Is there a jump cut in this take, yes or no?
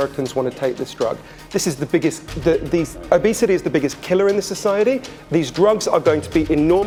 no